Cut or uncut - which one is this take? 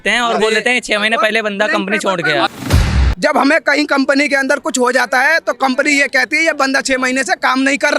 cut